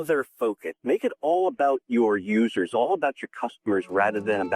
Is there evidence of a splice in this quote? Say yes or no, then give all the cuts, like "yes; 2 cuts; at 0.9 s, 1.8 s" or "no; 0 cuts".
no; 0 cuts